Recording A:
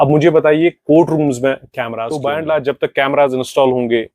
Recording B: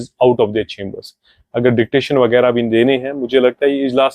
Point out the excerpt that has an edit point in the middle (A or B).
A